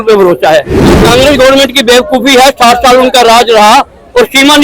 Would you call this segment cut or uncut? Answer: cut